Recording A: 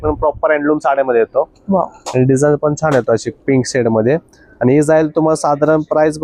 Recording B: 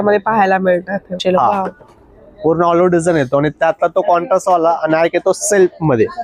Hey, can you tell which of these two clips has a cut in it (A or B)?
B